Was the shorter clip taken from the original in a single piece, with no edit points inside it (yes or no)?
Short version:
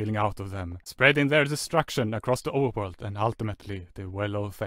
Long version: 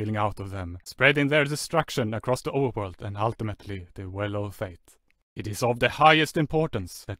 yes